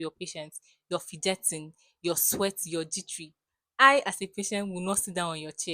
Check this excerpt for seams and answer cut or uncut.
uncut